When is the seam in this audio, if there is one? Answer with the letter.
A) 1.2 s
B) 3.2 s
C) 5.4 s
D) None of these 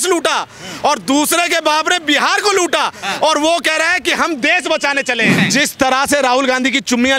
C